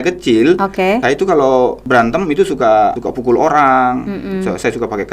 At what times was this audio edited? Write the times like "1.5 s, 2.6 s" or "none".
1.0 s, 1.8 s, 3.1 s